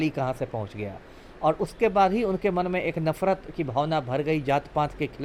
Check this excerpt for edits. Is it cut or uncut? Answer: uncut